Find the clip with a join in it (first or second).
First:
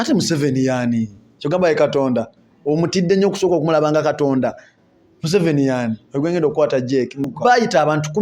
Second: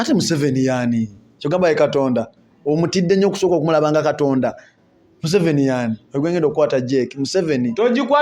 first